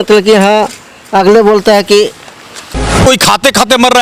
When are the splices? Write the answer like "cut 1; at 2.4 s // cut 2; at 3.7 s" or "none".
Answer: cut 1; at 3.0 s